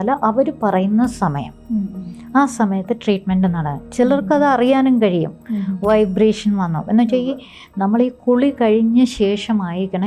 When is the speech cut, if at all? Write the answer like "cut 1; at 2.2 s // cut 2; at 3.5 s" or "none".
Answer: none